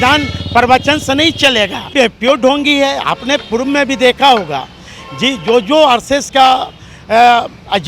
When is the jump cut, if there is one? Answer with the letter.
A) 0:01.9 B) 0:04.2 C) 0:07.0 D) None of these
A